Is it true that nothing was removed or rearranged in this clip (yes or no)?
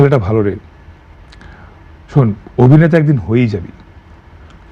yes